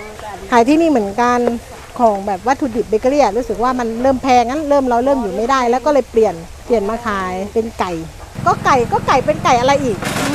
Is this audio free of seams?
no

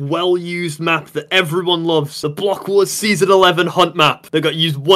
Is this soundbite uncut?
yes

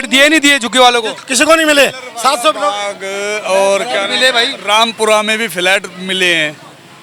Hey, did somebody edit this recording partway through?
no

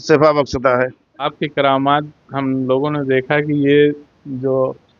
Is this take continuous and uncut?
no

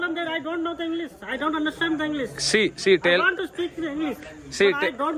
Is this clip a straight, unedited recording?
yes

